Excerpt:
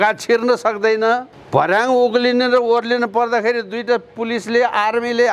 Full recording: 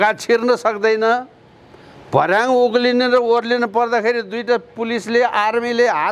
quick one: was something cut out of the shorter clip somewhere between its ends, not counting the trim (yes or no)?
yes